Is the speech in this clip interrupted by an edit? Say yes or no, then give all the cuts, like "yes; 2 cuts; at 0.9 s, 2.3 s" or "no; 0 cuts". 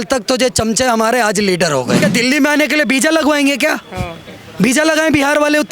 yes; 1 cut; at 2.0 s